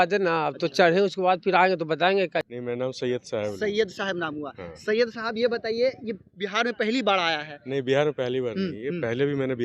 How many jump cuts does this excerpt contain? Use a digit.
1